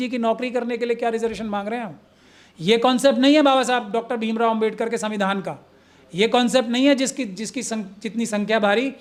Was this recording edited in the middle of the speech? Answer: no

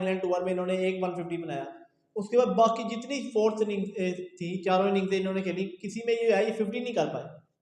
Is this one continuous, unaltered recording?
yes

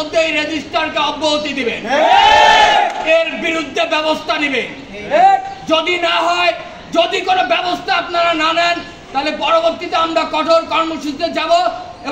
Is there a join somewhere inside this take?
no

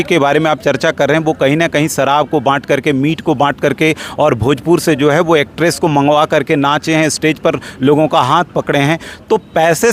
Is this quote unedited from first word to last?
yes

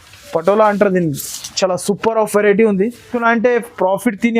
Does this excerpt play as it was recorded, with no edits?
no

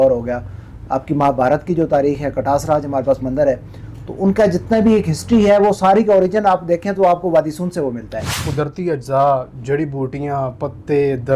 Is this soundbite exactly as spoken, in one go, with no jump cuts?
no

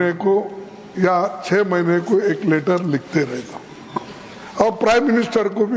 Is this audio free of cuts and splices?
yes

